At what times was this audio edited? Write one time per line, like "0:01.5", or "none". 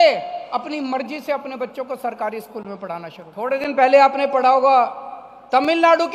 0:03.5